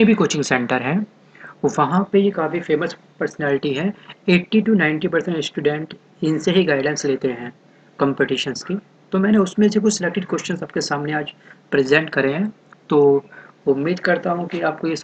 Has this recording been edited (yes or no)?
no